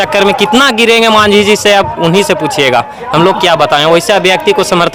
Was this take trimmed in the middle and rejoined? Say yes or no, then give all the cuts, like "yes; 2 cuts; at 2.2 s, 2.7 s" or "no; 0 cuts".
no; 0 cuts